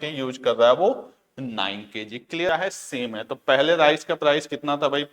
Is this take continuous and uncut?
no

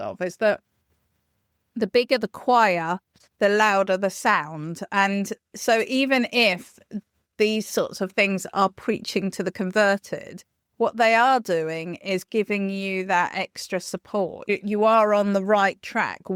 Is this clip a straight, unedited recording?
yes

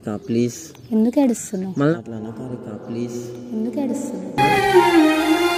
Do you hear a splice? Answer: no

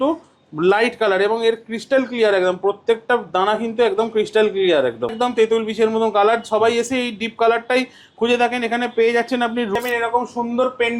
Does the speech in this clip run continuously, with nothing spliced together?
no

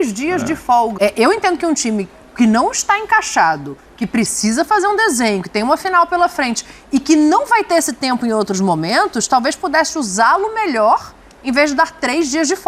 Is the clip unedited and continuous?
no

